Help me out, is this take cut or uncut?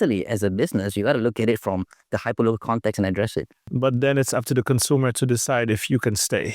cut